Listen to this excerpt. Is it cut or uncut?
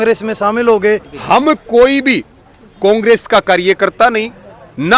cut